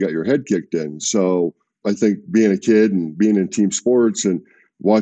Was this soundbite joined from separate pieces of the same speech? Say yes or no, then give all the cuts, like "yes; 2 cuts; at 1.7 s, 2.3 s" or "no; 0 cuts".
yes; 1 cut; at 1.7 s